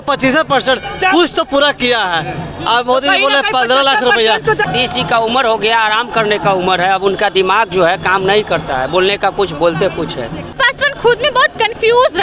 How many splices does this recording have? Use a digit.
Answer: 2